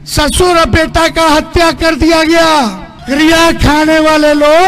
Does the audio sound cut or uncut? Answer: cut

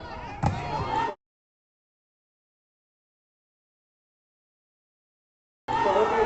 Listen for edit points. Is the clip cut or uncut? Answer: uncut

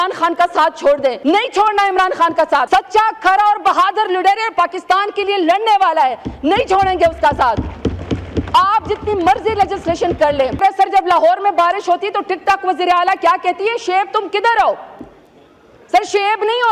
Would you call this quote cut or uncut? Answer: cut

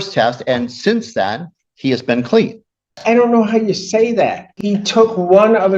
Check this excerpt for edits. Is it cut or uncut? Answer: cut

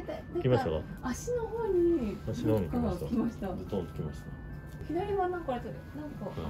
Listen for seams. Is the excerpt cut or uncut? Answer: uncut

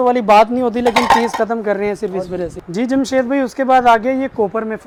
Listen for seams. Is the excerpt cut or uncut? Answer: uncut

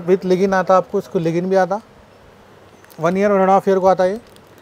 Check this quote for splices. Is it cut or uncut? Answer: uncut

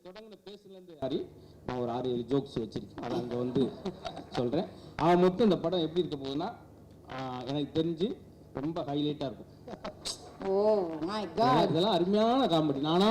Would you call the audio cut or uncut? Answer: cut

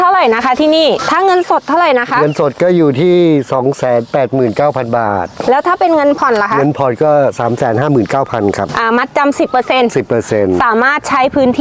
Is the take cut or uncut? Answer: cut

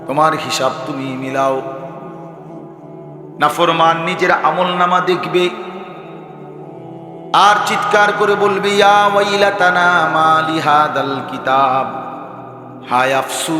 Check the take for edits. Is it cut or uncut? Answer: cut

